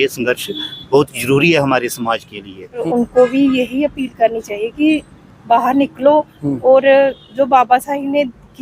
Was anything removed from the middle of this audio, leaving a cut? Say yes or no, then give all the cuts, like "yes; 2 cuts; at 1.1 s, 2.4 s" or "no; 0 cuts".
yes; 1 cut; at 2.8 s